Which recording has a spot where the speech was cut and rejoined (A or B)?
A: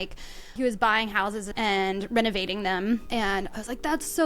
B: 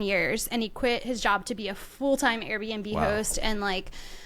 A